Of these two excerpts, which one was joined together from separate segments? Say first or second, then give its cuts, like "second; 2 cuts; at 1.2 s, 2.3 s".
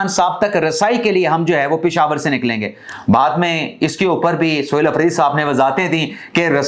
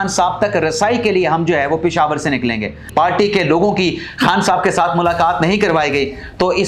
second; 1 cut; at 2.8 s